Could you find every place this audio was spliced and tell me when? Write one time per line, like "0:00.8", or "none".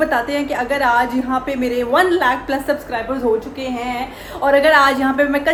none